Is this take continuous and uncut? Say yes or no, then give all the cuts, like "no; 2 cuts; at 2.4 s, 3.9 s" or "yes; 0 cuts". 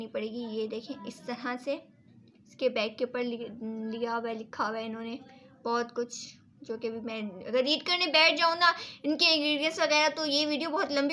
yes; 0 cuts